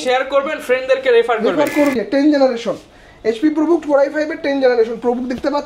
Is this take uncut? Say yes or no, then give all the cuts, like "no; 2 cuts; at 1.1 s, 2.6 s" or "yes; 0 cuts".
no; 1 cut; at 1.9 s